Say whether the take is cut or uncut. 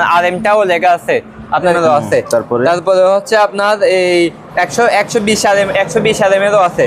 cut